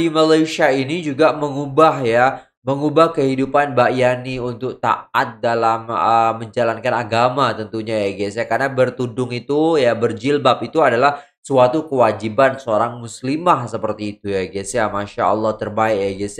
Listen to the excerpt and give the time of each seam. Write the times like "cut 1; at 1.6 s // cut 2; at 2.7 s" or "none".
none

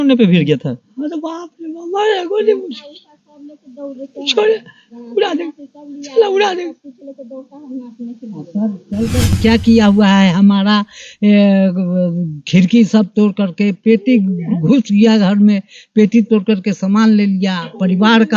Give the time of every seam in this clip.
cut 1; at 9.4 s

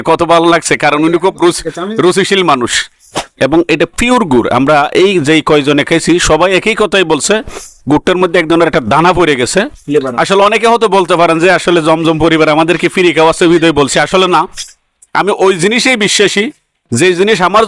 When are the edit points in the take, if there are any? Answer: cut 1; at 3.3 s

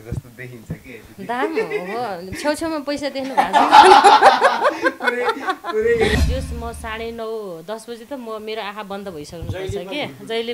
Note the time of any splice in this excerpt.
cut 1; at 6.2 s

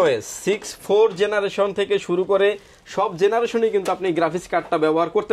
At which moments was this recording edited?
none

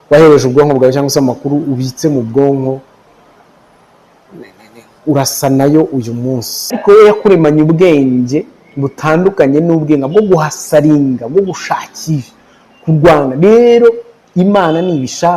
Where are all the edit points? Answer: cut 1; at 6.8 s

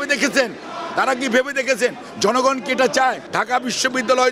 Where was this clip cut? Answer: cut 1; at 3.3 s

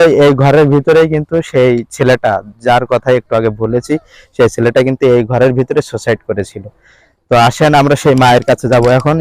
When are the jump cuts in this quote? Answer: none

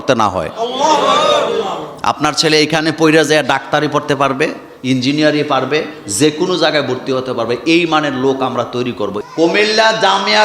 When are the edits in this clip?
cut 1; at 9.2 s

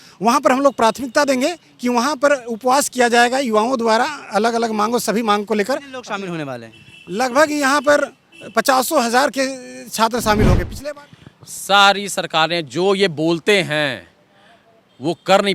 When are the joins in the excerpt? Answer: cut 1; at 10.8 s

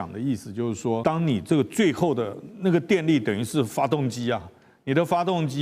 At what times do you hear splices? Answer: cut 1; at 1.0 s

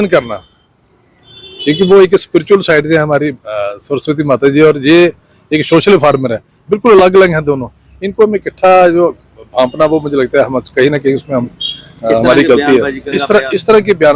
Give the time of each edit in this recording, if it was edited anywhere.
cut 1; at 13.1 s

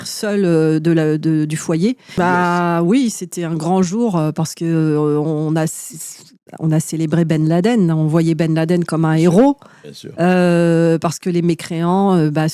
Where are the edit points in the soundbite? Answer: cut 1; at 2.2 s

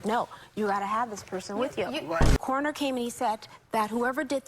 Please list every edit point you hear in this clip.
cut 1; at 2.0 s

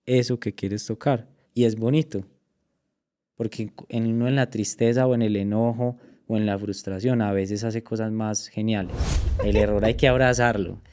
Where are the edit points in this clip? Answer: cut 1; at 1.4 s // cut 2; at 9.3 s

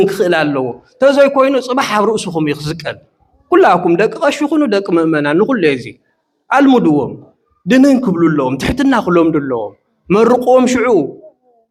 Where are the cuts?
none

